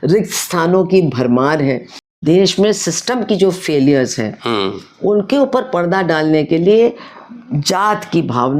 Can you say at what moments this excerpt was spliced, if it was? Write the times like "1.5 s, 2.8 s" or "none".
2.2 s